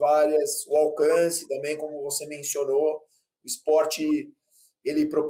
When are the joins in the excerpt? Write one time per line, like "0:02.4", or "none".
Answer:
none